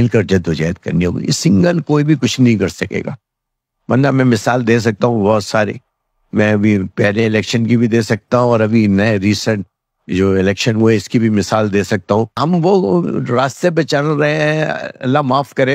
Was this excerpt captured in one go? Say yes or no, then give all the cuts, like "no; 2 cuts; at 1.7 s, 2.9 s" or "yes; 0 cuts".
no; 1 cut; at 12.3 s